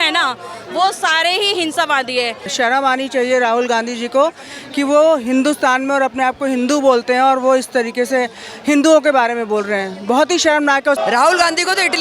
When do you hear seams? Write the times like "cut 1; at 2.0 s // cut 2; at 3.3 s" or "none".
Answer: cut 1; at 2.5 s // cut 2; at 11.0 s